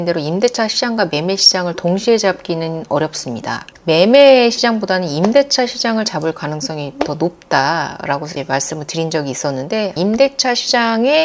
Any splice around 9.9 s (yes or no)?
yes